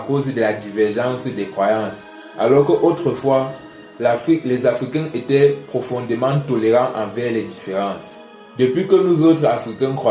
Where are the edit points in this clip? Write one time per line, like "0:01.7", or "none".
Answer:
none

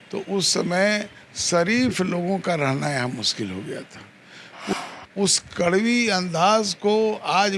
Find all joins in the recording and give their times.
0:04.7

